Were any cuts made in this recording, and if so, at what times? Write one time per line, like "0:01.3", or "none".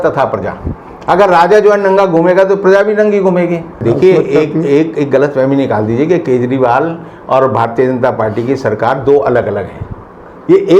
0:03.7